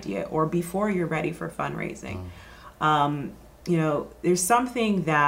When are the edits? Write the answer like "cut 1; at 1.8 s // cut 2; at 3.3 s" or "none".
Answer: none